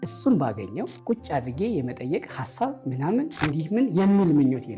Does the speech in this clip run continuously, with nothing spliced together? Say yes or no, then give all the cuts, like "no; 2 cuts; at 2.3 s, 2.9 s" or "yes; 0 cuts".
no; 2 cuts; at 1.0 s, 3.3 s